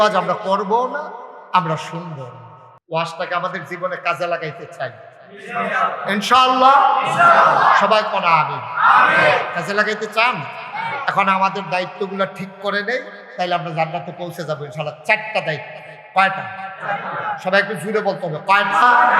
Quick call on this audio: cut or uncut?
uncut